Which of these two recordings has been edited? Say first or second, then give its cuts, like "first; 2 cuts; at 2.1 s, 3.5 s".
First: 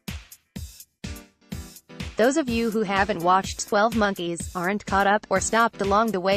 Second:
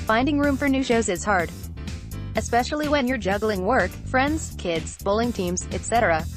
first; 1 cut; at 2.1 s